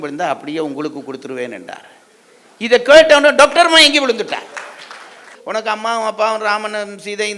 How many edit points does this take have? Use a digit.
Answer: 1